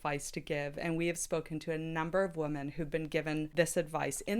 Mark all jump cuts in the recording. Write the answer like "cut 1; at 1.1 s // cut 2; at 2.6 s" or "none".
cut 1; at 3.5 s